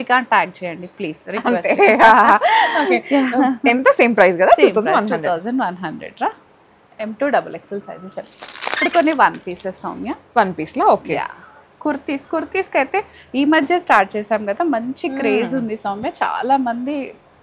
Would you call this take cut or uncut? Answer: uncut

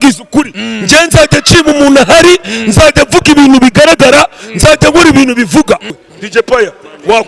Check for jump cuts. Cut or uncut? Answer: cut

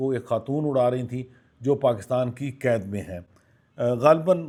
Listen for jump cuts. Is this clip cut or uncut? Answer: uncut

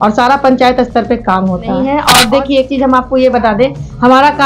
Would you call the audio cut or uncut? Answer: cut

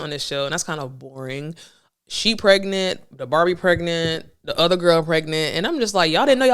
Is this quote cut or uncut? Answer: uncut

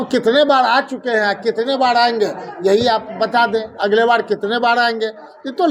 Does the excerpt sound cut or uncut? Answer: uncut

